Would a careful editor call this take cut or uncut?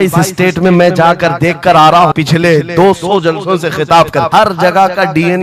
cut